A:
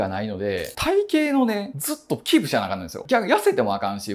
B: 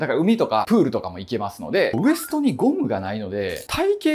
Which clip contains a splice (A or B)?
B